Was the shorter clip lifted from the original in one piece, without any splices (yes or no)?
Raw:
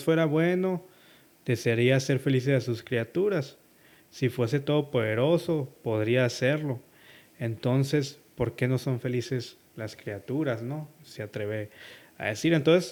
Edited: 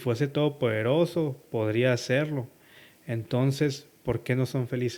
yes